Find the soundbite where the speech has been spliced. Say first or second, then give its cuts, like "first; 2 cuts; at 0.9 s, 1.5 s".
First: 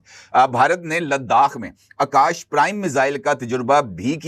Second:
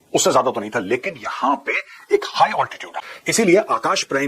second; 1 cut; at 3.2 s